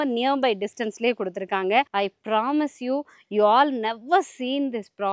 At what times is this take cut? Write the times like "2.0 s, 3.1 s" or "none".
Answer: 1.9 s